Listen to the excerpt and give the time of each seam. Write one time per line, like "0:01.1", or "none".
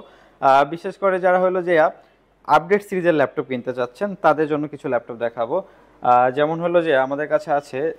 none